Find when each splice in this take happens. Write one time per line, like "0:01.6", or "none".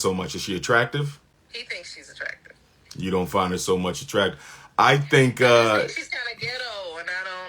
0:01.3